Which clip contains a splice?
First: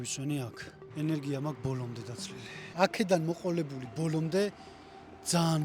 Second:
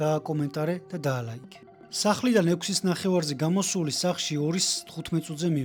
first; 1 cut; at 2.6 s

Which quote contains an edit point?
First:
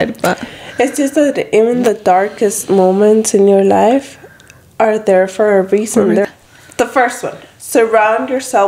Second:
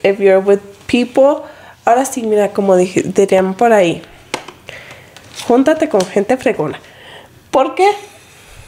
first; 1 cut; at 6.3 s

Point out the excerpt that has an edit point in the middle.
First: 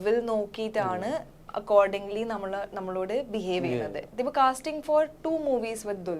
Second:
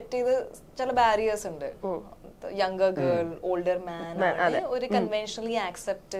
first; 1 cut; at 4.0 s

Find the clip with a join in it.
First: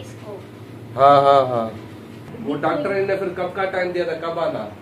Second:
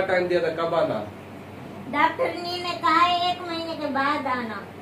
first; 1 cut; at 2.3 s

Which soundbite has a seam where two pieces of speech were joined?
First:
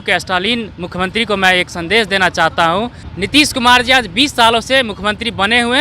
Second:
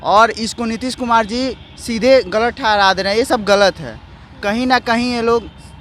first; 1 cut; at 3.0 s

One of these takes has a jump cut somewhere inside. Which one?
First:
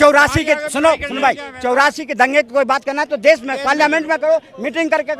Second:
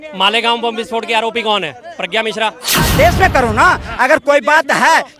second; 1 cut; at 2.9 s

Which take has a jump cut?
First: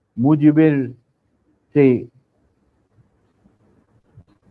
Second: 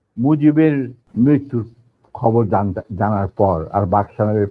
second; 1 cut; at 1.0 s

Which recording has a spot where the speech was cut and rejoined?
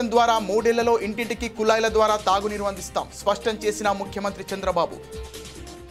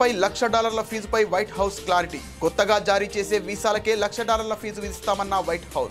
first; 1 cut; at 5.0 s

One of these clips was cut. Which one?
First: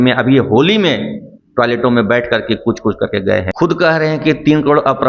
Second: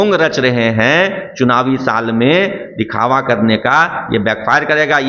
first; 1 cut; at 3.5 s

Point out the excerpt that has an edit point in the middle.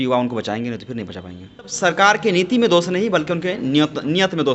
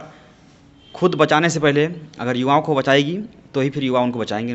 first; 1 cut; at 1.7 s

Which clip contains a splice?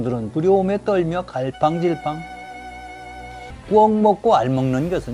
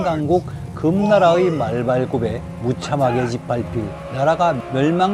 first; 1 cut; at 3.5 s

